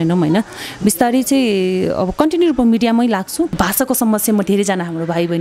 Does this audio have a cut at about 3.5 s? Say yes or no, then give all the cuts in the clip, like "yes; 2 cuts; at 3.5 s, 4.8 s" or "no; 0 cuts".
yes; 1 cut; at 3.5 s